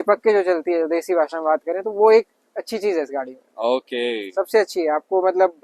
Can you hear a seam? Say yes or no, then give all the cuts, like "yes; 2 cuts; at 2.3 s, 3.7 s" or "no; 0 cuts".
no; 0 cuts